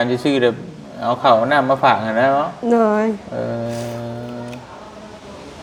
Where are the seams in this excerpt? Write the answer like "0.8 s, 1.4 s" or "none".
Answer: none